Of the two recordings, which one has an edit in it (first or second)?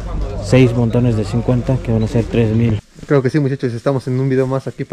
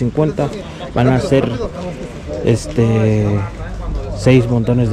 first